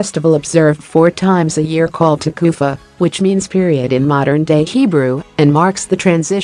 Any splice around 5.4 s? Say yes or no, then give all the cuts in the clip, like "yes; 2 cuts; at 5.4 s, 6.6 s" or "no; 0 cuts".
no; 0 cuts